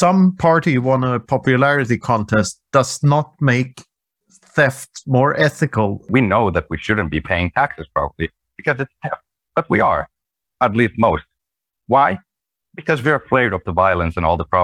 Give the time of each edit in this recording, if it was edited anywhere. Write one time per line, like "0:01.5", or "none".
0:06.0
0:09.3